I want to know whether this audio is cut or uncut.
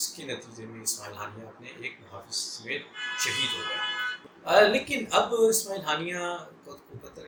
uncut